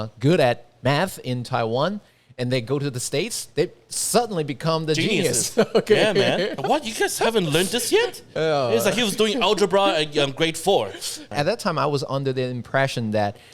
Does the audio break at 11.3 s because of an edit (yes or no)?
yes